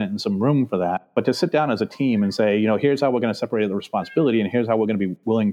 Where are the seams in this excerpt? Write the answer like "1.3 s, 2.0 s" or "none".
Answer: none